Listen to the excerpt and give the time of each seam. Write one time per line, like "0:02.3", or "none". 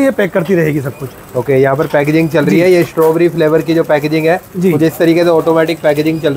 none